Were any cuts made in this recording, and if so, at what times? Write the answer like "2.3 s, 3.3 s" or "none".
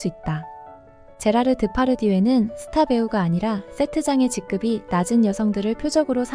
1.1 s